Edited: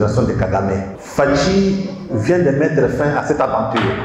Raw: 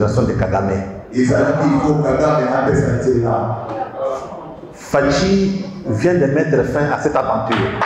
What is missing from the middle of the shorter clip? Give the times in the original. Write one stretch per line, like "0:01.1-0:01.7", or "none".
0:01.0-0:04.7